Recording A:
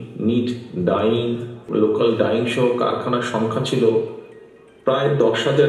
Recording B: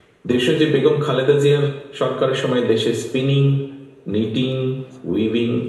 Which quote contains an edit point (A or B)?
A